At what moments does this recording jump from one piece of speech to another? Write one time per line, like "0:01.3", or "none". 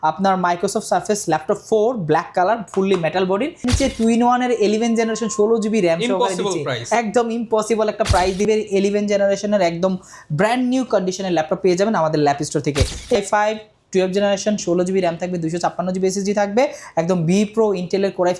0:03.6
0:08.5
0:13.2